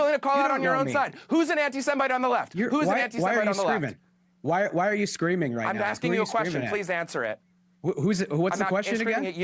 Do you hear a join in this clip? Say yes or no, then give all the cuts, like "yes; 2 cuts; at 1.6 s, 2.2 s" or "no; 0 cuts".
yes; 1 cut; at 4.0 s